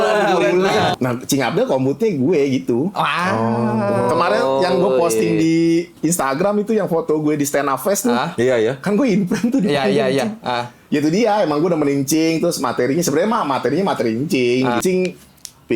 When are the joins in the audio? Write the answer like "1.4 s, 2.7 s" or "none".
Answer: 0.9 s, 14.8 s